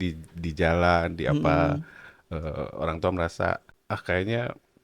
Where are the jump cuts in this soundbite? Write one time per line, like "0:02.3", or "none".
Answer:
0:03.7